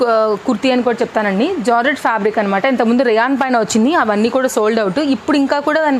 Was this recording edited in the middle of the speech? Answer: no; 0 cuts

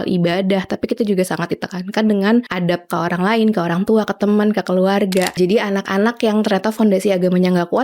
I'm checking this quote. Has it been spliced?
yes; 2 cuts; at 2.5 s, 5.4 s

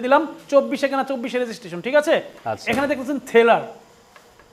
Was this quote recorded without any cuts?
yes; 0 cuts

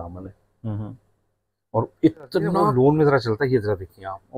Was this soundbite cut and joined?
yes; 1 cut; at 2.6 s

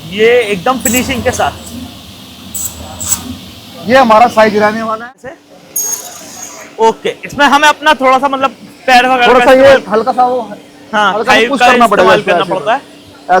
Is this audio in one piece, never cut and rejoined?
no; 1 cut; at 4.9 s

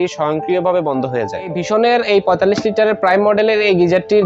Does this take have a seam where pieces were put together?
yes; 1 cut; at 1.5 s

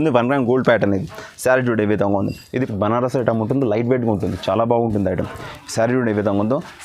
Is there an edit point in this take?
yes; 1 cut; at 2.7 s

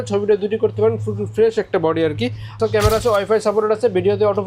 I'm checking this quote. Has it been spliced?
yes; 1 cut; at 2.6 s

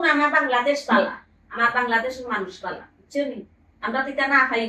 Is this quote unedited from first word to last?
yes; 0 cuts

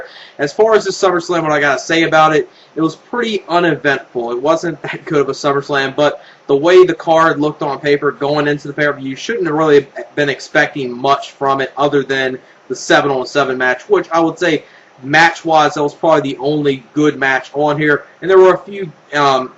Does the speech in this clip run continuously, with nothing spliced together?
no; 1 cut; at 17.7 s

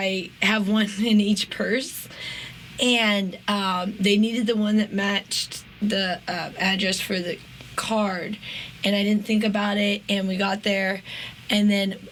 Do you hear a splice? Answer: no; 0 cuts

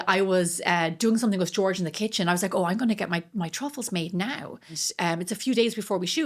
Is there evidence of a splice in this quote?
yes; 1 cut; at 4.8 s

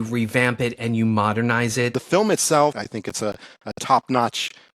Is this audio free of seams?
no; 2 cuts; at 2.0 s, 2.9 s

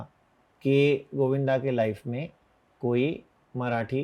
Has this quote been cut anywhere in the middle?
no; 0 cuts

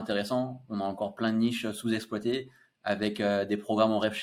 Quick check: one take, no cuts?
yes; 0 cuts

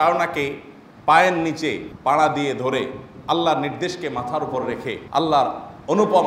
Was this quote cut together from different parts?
yes; 2 cuts; at 1.9 s, 5.0 s

